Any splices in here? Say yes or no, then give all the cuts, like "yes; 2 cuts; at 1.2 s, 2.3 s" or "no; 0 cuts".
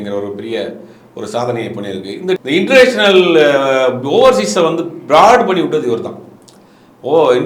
yes; 1 cut; at 2.4 s